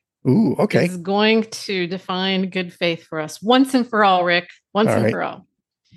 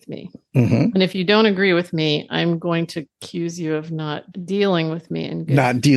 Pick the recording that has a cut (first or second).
second